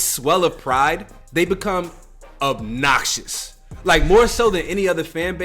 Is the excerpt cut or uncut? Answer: cut